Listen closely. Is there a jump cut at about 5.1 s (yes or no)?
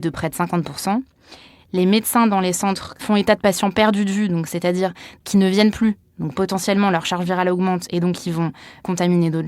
yes